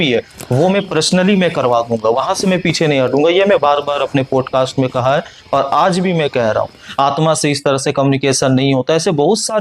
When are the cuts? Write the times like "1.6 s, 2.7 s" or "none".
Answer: 6.8 s